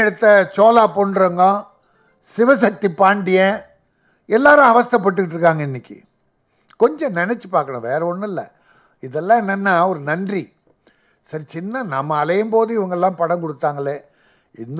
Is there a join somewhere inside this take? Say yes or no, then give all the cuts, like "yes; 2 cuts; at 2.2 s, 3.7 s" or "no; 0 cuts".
no; 0 cuts